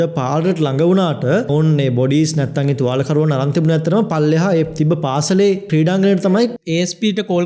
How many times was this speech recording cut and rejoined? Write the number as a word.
three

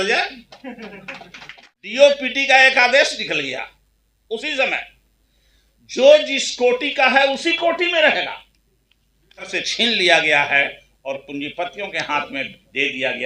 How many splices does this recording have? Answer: two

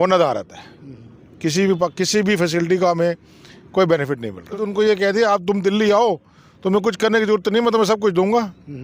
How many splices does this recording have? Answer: one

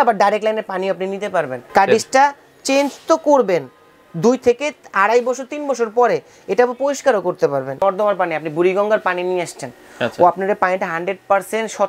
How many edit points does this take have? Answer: two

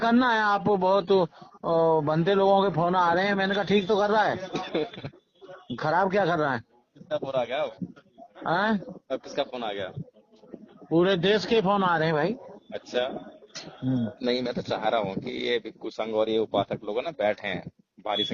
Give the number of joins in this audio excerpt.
one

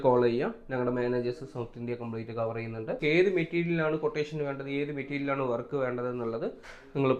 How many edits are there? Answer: one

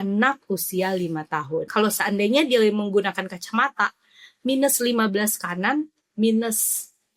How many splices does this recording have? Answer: one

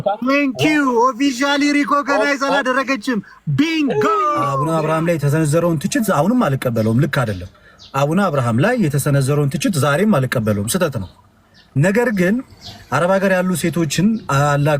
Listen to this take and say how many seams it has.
one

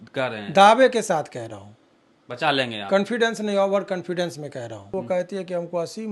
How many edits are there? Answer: one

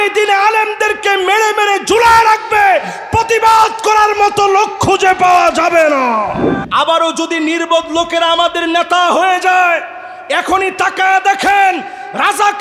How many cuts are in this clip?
one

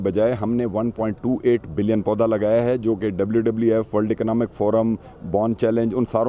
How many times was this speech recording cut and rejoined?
zero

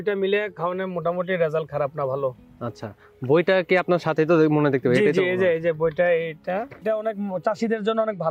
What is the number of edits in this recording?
one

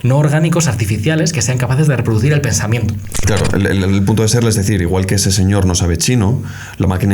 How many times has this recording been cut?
one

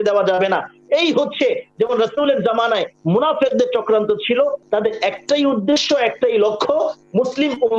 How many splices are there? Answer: one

